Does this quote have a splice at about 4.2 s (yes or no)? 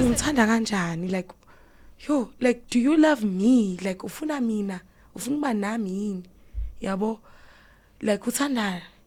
no